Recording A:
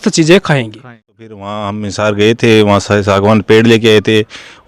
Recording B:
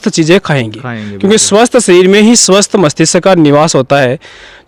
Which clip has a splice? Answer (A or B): A